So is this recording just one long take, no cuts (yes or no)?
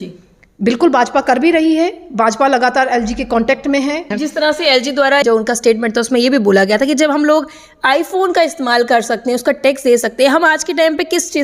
no